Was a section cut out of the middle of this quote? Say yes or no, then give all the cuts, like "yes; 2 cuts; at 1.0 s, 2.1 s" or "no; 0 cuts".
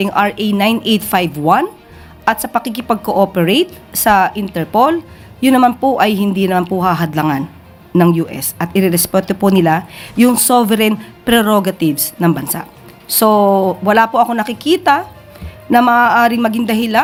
no; 0 cuts